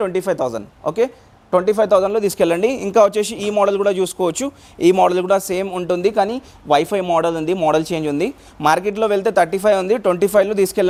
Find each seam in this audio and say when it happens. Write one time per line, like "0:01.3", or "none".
none